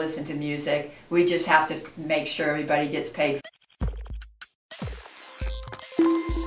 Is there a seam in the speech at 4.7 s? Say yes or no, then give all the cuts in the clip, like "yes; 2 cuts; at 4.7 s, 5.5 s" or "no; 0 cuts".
no; 1 cut; at 3.4 s